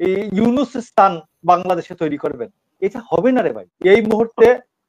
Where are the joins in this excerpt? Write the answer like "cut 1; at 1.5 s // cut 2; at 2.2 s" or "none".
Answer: cut 1; at 3.7 s